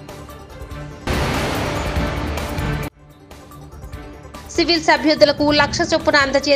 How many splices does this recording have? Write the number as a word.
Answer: two